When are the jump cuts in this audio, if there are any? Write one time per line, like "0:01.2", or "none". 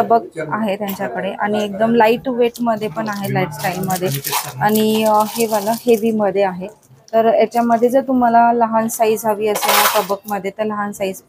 none